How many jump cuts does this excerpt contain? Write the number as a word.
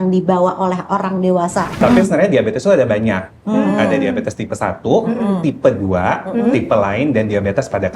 one